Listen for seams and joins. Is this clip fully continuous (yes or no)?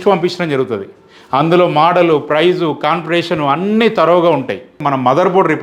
no